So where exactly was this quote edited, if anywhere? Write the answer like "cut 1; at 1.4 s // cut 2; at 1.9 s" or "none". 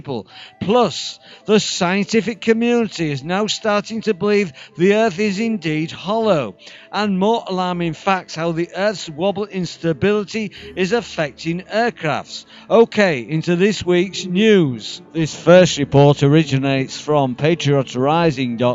cut 1; at 4.0 s